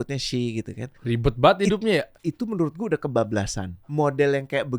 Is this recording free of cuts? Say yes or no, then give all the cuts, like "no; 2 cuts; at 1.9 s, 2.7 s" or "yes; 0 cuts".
no; 3 cuts; at 1.0 s, 2.2 s, 3.8 s